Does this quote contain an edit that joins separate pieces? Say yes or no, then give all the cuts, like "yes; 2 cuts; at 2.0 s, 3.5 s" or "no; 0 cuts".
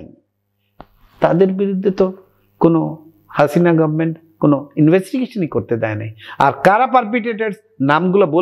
no; 0 cuts